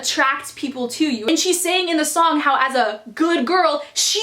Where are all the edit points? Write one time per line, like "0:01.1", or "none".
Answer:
0:01.2